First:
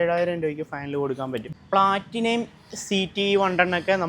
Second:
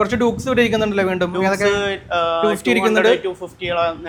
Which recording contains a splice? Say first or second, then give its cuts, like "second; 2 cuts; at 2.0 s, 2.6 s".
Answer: first; 1 cut; at 1.4 s